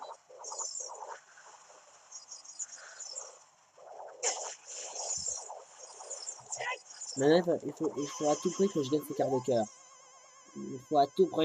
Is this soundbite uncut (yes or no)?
yes